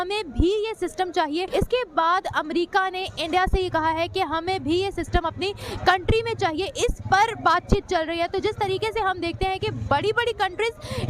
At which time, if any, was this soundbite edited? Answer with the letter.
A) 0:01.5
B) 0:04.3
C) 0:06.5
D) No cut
A